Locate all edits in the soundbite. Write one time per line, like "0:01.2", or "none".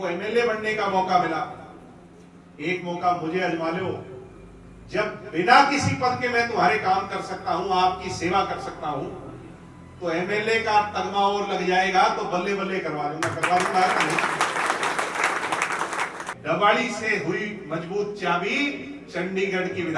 0:16.3